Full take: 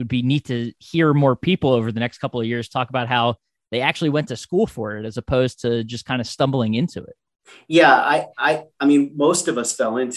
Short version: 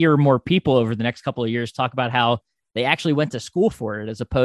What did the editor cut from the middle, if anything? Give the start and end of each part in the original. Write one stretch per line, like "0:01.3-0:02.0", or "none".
none

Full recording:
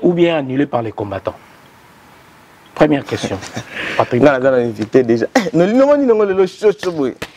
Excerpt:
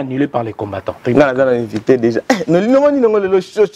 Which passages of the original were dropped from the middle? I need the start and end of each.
0:01.4-0:04.1

